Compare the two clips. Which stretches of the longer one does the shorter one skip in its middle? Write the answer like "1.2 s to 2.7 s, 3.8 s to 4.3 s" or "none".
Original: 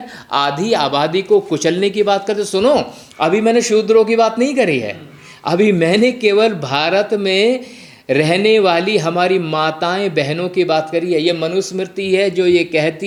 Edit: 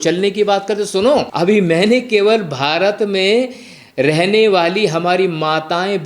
2.9 s to 5.4 s

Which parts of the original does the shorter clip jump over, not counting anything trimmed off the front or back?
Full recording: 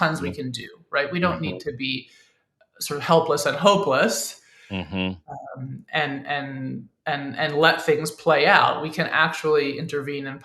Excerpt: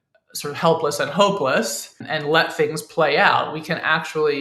4.5 s to 7.3 s

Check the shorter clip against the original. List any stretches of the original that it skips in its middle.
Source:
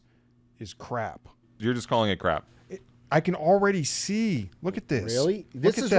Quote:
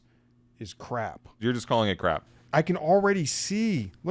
1.3 s to 1.5 s, 2.5 s to 2.9 s

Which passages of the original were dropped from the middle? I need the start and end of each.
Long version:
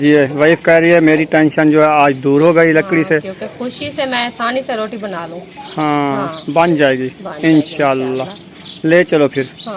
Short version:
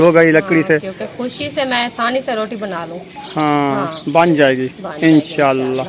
none

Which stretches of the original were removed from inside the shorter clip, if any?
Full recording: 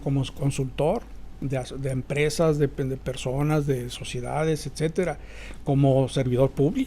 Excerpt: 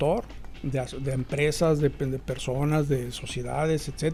none

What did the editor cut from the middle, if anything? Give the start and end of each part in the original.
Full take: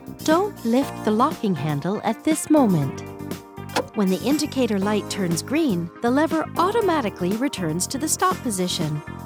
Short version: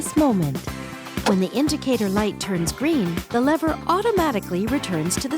3.5 s to 3.9 s

